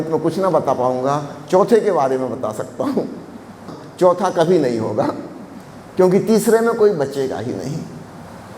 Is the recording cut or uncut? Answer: cut